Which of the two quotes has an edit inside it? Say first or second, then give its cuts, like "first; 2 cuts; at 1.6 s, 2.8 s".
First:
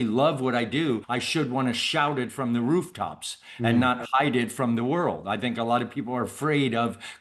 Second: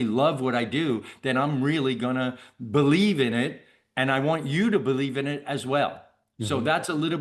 first; 1 cut; at 1.1 s